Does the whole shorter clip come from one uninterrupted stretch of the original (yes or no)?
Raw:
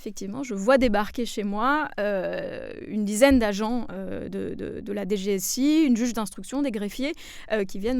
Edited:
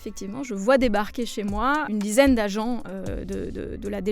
no